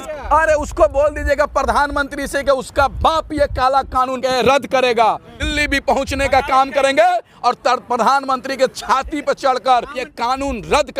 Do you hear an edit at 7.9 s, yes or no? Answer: no